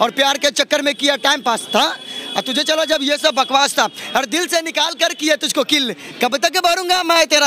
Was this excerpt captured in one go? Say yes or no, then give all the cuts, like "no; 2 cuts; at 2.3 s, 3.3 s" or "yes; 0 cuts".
yes; 0 cuts